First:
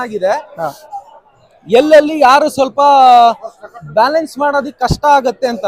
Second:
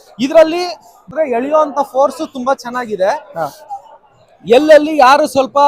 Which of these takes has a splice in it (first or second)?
second